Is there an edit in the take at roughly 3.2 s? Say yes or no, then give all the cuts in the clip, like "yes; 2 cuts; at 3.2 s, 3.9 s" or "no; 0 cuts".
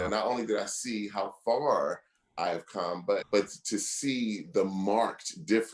yes; 1 cut; at 3.2 s